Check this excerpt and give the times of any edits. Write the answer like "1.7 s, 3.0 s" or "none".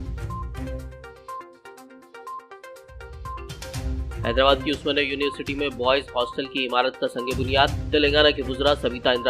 2.3 s